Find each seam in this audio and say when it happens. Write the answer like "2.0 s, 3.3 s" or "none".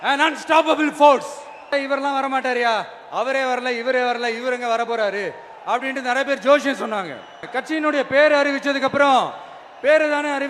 1.7 s, 7.5 s